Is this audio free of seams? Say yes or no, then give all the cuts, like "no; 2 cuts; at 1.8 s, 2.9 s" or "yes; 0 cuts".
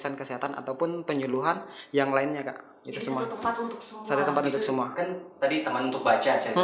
yes; 0 cuts